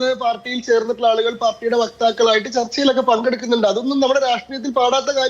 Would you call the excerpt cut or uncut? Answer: uncut